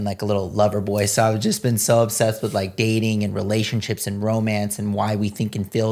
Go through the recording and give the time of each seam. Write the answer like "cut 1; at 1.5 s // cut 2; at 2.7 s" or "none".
none